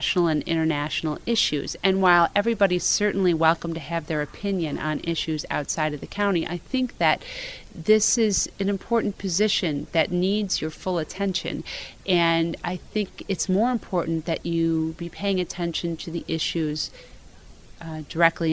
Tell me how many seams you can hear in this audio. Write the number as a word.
zero